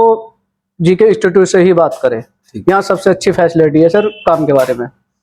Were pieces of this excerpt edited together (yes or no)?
no